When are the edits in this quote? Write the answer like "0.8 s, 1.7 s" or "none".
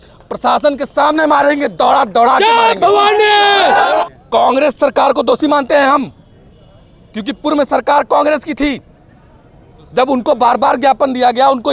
4.0 s